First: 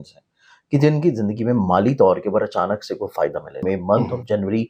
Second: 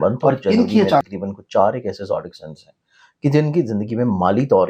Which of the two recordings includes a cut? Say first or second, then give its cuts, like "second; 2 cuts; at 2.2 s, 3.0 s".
first; 1 cut; at 3.6 s